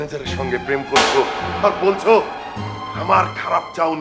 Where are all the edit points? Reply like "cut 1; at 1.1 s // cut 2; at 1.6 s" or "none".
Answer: none